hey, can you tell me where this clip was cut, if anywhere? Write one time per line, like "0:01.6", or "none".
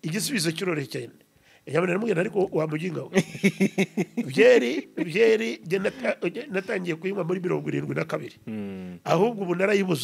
none